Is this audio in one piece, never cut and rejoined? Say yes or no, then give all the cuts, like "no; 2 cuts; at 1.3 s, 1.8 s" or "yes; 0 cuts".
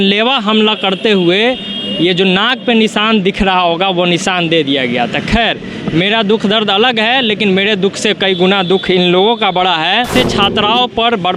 no; 1 cut; at 10.1 s